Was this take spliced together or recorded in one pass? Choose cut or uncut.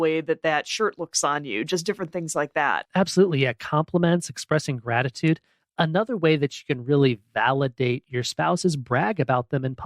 cut